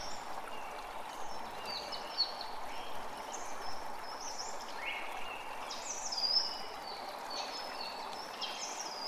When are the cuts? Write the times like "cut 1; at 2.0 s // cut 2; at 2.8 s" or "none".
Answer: none